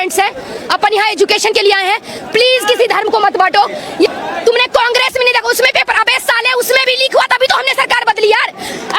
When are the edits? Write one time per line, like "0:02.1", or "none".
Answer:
0:03.9